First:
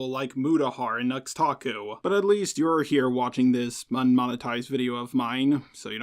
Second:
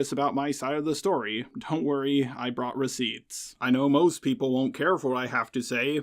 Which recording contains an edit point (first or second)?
second